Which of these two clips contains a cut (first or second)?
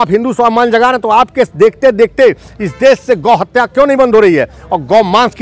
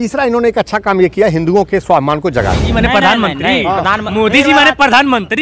second